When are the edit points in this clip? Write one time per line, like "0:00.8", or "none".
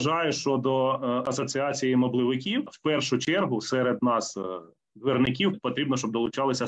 0:02.7
0:05.6